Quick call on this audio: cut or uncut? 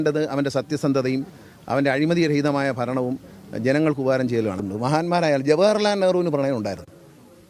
cut